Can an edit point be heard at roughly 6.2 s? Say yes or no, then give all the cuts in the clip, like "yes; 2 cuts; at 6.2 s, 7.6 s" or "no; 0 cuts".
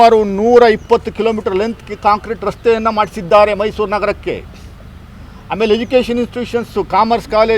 no; 0 cuts